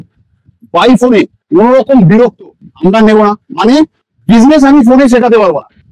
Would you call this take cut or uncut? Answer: uncut